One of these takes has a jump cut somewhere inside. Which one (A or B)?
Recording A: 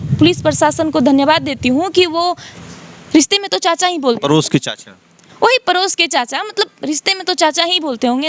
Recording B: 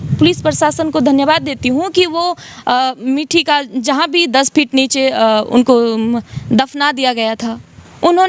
A